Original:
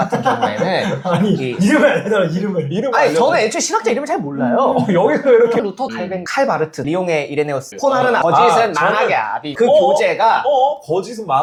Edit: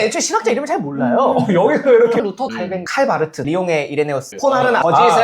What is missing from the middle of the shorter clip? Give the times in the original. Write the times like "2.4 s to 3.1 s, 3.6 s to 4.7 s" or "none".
none